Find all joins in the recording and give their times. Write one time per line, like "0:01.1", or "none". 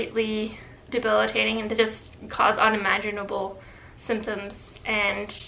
0:01.8